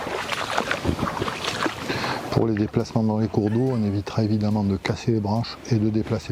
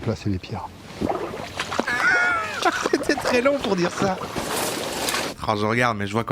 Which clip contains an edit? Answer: second; 1 cut; at 5.4 s

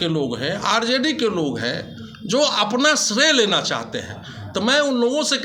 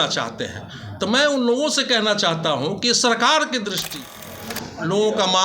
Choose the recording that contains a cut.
second; 1 cut; at 4.2 s

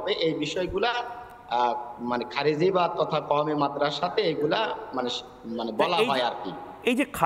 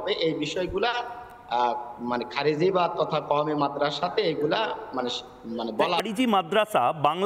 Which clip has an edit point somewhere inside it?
second; 1 cut; at 6.0 s

